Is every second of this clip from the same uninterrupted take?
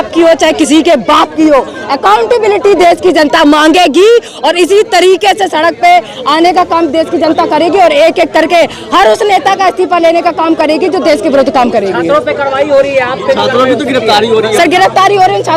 yes; 0 cuts

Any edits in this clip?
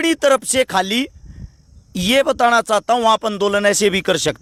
no; 0 cuts

